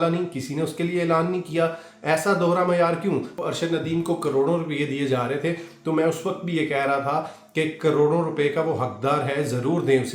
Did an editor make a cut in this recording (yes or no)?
yes